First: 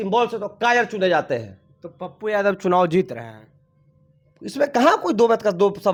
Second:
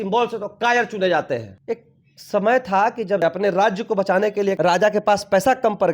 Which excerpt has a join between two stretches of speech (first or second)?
second